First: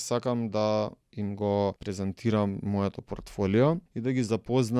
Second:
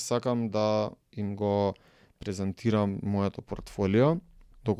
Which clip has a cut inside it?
first; 2 cuts; at 1.8 s, 3.9 s

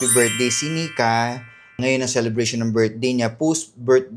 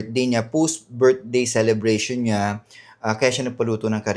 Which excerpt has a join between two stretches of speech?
first; 1 cut; at 1.8 s

